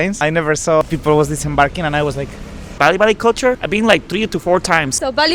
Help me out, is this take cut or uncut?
cut